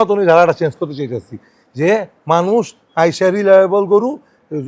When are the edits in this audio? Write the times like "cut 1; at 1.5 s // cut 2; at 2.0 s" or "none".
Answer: none

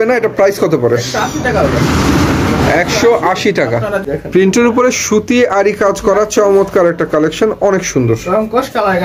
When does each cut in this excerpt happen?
cut 1; at 4.0 s

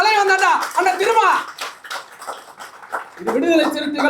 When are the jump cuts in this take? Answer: none

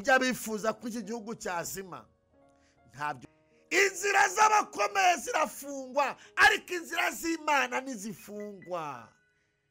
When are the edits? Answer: cut 1; at 3.2 s

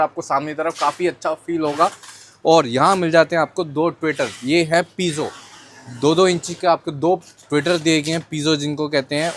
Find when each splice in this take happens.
none

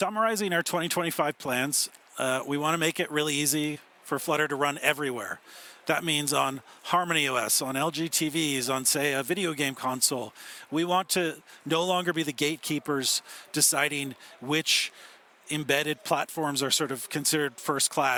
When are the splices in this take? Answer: none

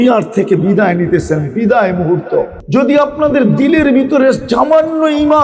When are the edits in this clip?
cut 1; at 2.6 s

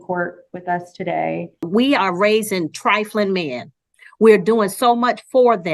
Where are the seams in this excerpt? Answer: cut 1; at 1.5 s

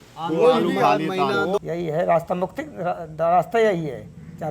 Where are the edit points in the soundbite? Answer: cut 1; at 1.6 s

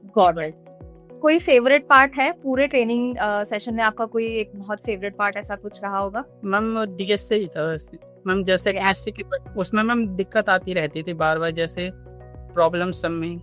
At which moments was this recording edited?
none

